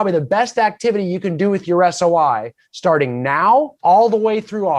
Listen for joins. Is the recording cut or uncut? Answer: cut